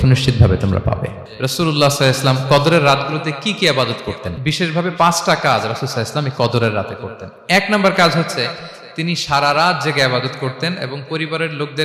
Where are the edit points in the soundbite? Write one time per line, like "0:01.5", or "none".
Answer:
0:01.2
0:04.3